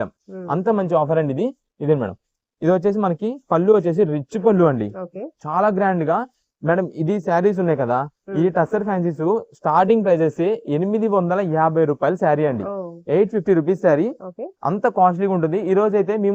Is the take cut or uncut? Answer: uncut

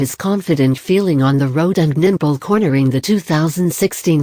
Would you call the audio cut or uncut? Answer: cut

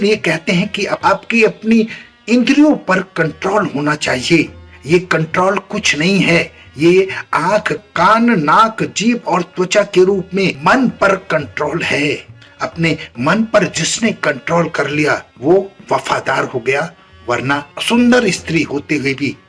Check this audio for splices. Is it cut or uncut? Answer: uncut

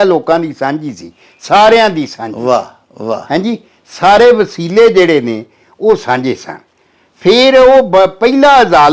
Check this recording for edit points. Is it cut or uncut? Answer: uncut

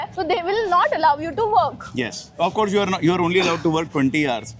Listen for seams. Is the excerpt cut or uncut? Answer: uncut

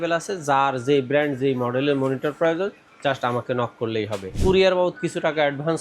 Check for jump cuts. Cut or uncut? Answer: cut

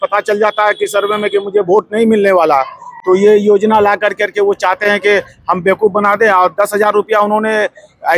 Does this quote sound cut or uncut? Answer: uncut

